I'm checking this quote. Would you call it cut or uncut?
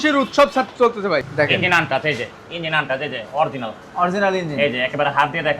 cut